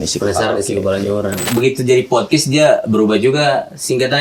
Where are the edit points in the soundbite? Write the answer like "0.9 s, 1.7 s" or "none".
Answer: 1.4 s